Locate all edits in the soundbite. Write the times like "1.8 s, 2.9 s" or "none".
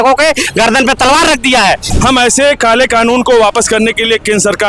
1.9 s